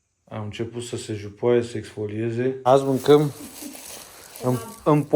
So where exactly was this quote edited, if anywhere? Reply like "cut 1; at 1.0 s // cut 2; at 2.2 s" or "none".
cut 1; at 2.7 s